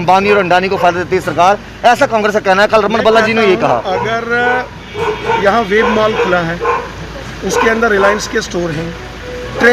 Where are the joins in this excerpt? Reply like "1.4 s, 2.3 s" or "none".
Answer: none